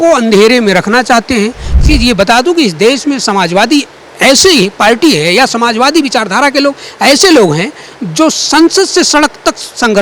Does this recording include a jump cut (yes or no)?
yes